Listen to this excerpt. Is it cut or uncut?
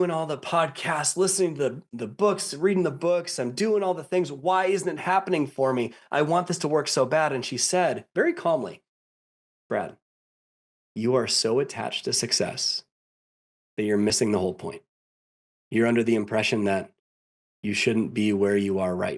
cut